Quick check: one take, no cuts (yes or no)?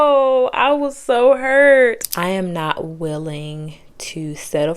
no